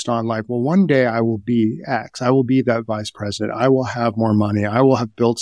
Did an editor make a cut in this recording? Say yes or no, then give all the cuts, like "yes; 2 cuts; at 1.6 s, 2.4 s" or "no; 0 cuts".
no; 0 cuts